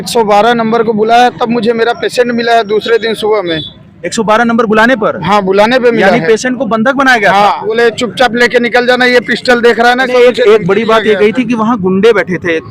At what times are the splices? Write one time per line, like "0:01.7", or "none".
0:07.6
0:10.1